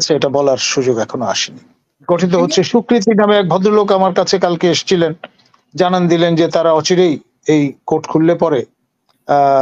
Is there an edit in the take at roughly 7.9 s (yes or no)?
no